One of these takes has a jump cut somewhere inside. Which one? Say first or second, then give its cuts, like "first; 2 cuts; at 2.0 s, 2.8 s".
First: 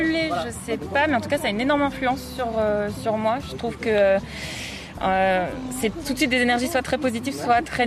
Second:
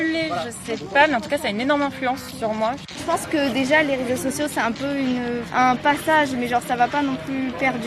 second; 2 cuts; at 2.4 s, 5.4 s